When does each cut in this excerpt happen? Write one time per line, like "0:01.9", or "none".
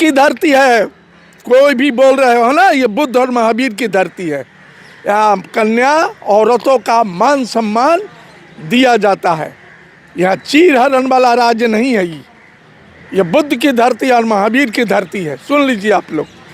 none